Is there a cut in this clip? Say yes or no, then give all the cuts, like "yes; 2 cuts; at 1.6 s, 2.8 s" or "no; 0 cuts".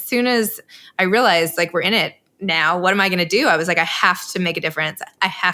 yes; 1 cut; at 1.5 s